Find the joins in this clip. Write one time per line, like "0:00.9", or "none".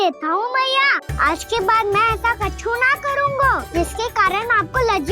0:01.1
0:03.6

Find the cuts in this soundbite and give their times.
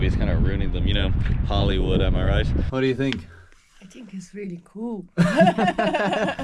0:02.7

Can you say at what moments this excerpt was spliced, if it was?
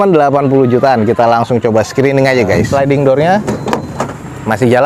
0:02.6

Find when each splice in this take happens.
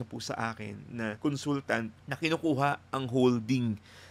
0:01.2
0:02.0

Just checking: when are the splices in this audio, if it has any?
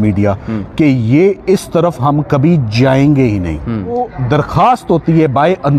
0:03.9

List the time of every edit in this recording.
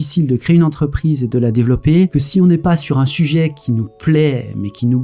0:02.2

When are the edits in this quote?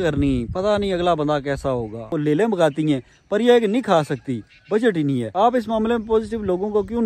0:02.1
0:05.3

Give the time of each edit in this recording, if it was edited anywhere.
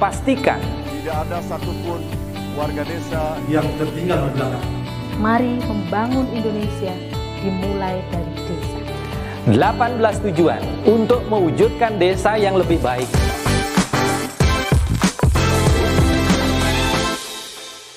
0:13.1

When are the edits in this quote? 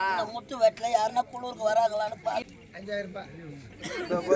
0:02.4

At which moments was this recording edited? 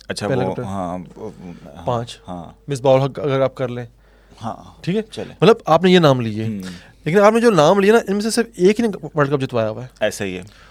none

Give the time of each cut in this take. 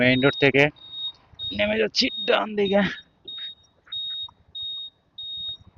none

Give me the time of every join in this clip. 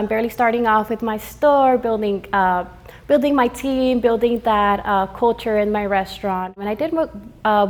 none

